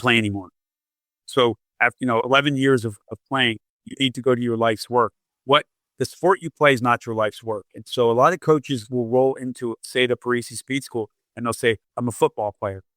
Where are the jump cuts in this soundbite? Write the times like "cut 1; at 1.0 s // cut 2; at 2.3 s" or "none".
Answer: cut 1; at 5.3 s // cut 2; at 11.9 s